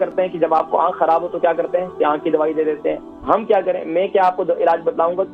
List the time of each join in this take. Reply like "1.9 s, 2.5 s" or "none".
none